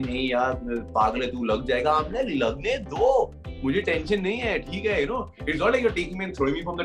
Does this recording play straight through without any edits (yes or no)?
yes